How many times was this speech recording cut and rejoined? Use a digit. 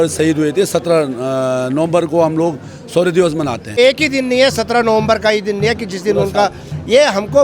1